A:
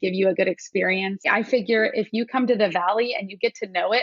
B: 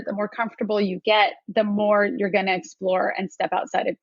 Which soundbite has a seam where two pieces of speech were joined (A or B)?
A